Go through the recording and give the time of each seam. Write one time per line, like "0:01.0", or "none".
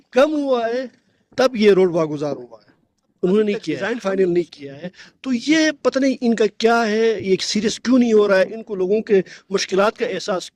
0:03.9